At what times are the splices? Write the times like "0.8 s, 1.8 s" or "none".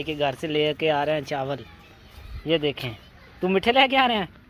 none